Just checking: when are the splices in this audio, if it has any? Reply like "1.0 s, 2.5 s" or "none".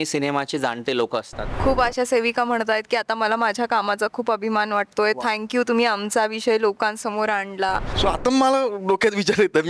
1.4 s, 7.9 s